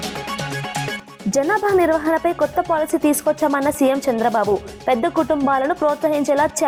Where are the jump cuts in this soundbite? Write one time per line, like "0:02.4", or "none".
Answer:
none